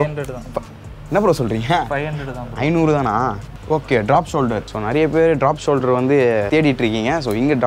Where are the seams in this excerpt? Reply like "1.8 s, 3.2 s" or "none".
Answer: 3.5 s, 4.7 s, 6.5 s